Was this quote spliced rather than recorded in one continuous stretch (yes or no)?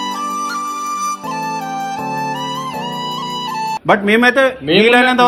no